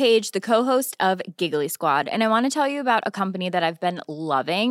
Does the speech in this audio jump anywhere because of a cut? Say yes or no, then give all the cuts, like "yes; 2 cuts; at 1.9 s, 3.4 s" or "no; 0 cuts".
no; 0 cuts